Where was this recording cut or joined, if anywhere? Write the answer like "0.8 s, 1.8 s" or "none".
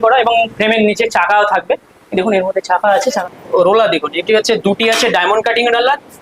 3.1 s